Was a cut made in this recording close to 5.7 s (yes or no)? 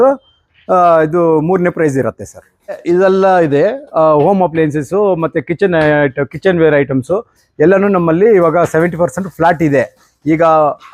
no